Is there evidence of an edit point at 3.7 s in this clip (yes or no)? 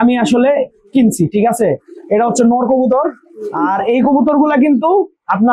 yes